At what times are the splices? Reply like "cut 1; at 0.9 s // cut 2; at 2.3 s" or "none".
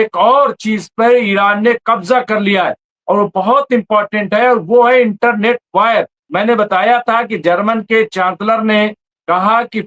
cut 1; at 6.2 s